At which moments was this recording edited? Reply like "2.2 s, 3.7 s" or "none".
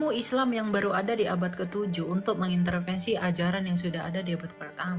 none